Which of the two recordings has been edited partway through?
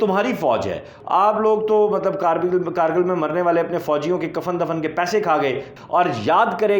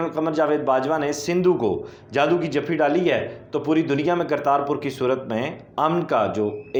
first; 2 cuts; at 0.9 s, 5.7 s

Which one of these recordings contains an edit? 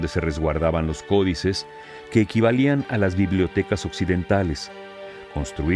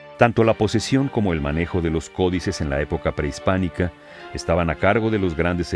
first; 1 cut; at 3.9 s

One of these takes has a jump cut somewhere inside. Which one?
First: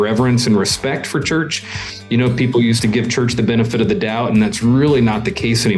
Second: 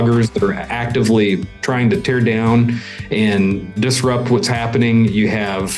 second; 1 cut; at 1.5 s

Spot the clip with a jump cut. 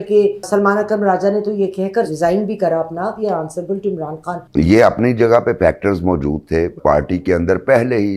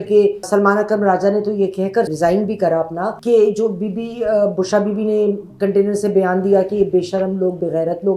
first; 3 cuts; at 3.2 s, 4.4 s, 6.8 s

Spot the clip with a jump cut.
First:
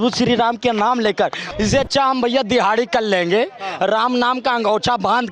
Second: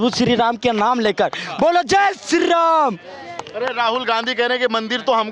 first; 1 cut; at 1.4 s

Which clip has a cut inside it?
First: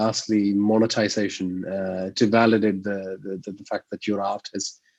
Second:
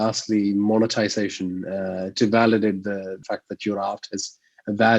second; 1 cut; at 3.2 s

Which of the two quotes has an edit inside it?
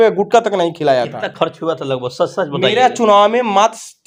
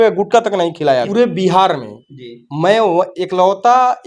second; 1 cut; at 1.1 s

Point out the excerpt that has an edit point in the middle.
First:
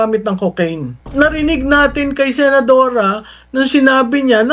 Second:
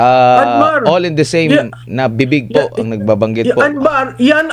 first; 1 cut; at 1.0 s

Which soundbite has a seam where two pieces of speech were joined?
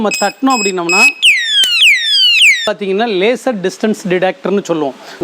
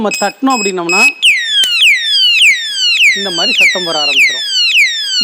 first; 1 cut; at 2.7 s

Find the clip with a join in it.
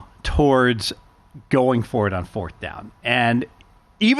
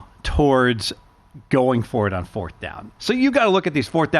second; 1 cut; at 2.9 s

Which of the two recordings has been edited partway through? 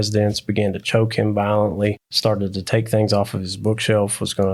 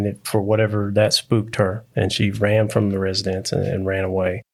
first; 1 cut; at 2.1 s

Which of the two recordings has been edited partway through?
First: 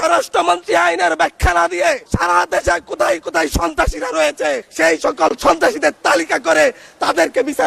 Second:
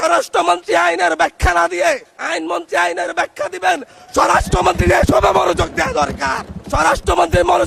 first; 2 cuts; at 2.1 s, 4.7 s

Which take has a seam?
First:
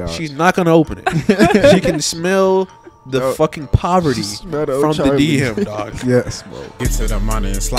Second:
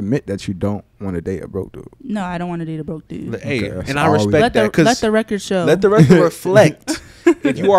first; 1 cut; at 6.7 s

